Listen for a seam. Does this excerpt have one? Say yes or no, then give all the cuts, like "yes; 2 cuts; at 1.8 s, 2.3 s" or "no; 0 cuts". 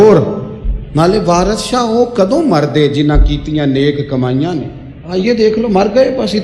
yes; 1 cut; at 5.1 s